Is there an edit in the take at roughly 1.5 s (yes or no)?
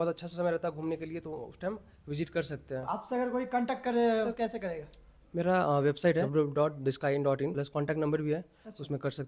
no